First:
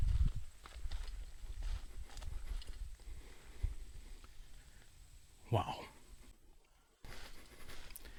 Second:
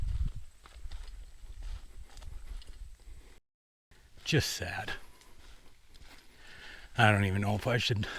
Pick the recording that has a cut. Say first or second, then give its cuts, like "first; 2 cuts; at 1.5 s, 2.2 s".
second; 2 cuts; at 3.9 s, 6.5 s